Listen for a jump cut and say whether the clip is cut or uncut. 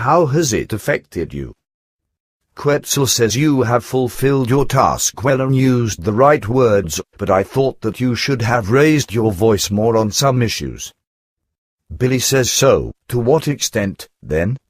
cut